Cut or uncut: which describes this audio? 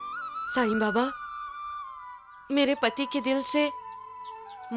uncut